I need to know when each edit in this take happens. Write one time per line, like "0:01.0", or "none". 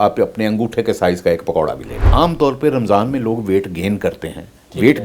0:02.1